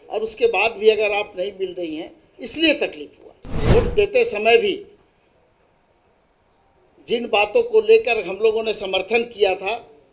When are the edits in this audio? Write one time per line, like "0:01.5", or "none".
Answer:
0:03.6